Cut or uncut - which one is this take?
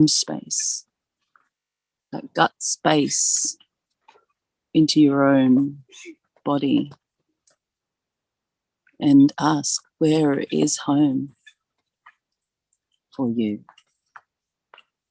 uncut